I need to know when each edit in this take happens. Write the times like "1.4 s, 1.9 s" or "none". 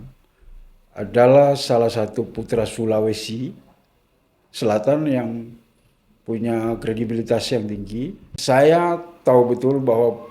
8.3 s